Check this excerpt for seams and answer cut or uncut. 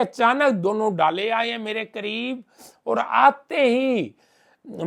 uncut